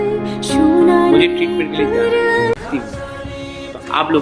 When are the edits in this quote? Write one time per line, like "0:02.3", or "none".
0:02.6